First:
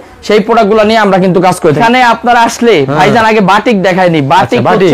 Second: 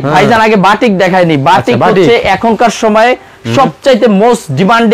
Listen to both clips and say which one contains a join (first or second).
first